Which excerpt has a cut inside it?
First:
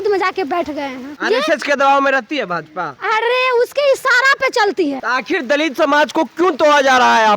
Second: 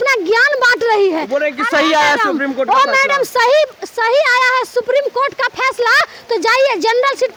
first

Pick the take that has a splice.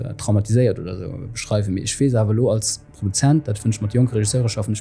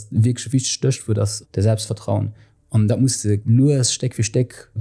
second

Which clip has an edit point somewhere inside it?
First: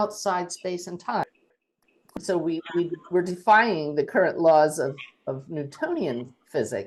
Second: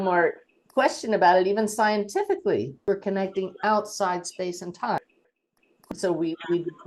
second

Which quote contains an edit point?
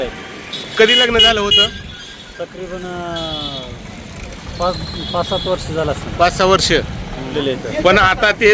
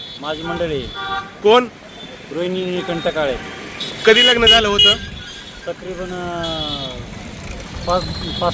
first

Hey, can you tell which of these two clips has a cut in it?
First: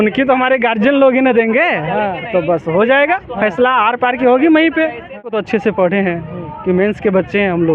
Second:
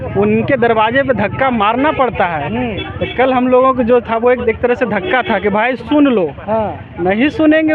first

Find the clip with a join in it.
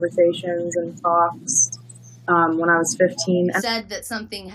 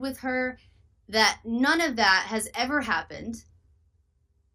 first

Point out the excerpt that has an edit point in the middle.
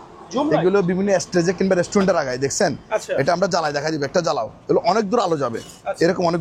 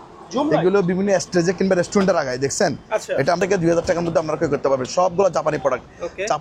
second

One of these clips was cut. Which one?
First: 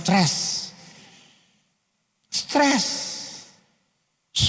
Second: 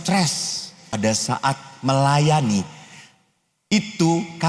second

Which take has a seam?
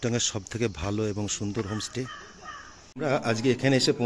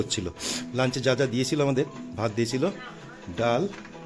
first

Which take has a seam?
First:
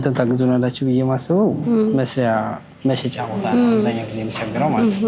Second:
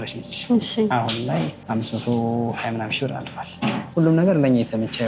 second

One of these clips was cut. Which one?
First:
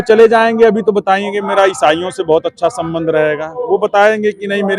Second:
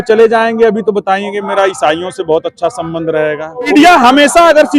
second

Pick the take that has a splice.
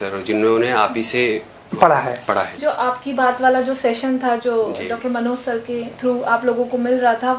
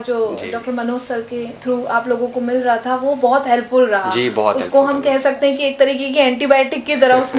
first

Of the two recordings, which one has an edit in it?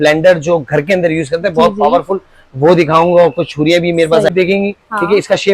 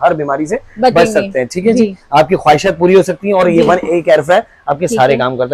first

